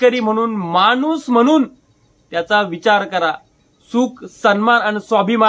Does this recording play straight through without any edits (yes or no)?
yes